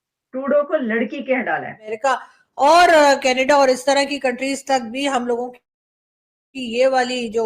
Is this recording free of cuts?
no; 1 cut; at 1.9 s

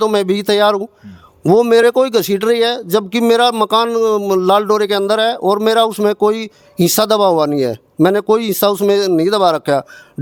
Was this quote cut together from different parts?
no; 0 cuts

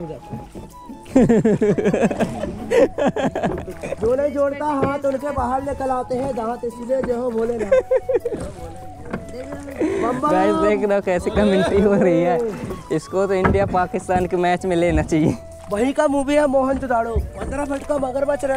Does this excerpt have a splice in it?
yes; 2 cuts; at 3.8 s, 15.5 s

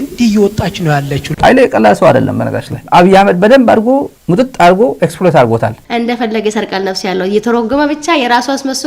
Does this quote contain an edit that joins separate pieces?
yes; 2 cuts; at 2.8 s, 5.8 s

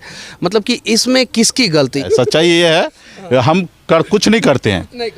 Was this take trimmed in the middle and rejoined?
yes; 1 cut; at 2.0 s

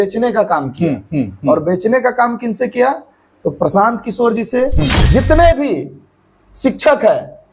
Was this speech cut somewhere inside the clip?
yes; 1 cut; at 5.0 s

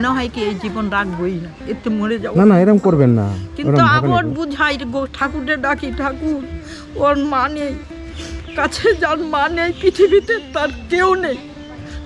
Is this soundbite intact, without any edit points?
yes; 0 cuts

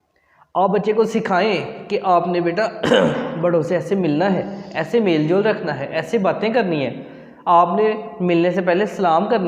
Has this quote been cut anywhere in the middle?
no; 0 cuts

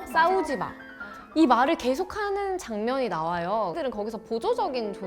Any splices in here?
yes; 1 cut; at 3.7 s

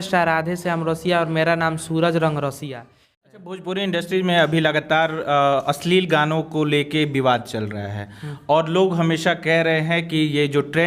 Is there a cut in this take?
yes; 1 cut; at 3.2 s

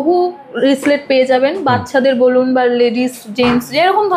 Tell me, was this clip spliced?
no; 0 cuts

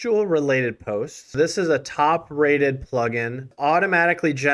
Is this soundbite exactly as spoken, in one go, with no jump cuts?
no; 2 cuts; at 1.2 s, 3.5 s

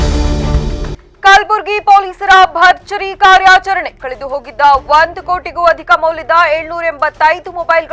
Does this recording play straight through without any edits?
yes; 0 cuts

